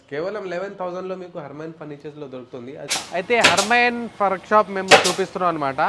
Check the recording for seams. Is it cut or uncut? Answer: cut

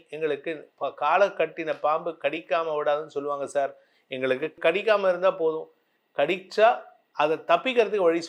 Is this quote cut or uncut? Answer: uncut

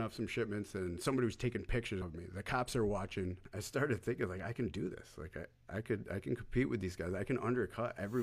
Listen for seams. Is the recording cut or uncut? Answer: cut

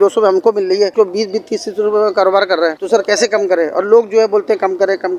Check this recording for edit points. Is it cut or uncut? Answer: cut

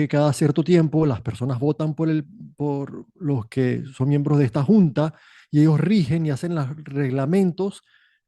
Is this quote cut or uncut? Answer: cut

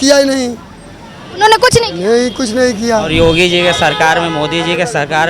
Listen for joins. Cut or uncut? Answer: cut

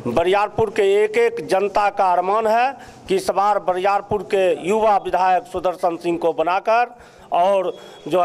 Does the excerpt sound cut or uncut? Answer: uncut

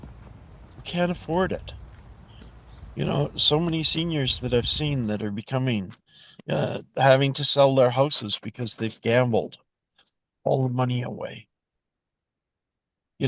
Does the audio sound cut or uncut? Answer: uncut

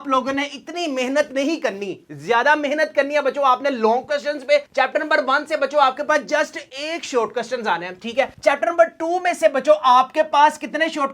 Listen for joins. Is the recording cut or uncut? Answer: uncut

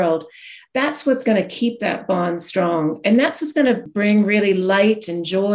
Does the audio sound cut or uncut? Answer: cut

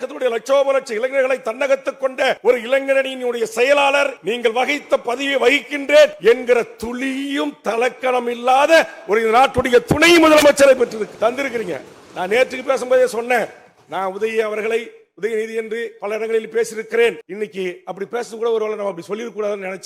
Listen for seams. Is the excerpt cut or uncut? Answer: cut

